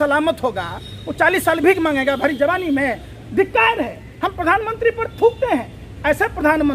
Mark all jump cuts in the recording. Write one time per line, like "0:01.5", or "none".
none